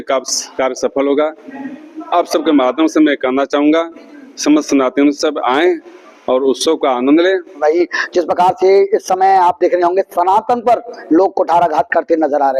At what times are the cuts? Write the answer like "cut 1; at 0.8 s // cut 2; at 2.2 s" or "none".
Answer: cut 1; at 7.6 s